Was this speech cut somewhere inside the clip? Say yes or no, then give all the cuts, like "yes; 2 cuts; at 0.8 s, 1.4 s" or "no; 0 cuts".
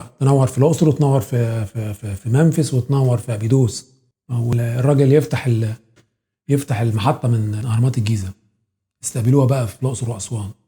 yes; 1 cut; at 4.5 s